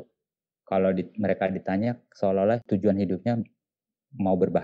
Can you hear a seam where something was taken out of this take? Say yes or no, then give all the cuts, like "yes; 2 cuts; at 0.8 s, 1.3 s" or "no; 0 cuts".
yes; 1 cut; at 2.6 s